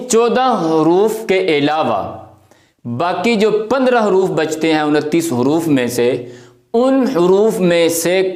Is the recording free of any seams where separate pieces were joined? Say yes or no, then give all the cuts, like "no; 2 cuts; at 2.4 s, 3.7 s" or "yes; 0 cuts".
yes; 0 cuts